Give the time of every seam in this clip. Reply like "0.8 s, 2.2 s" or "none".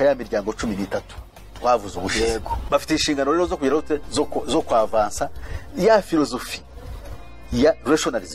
2.6 s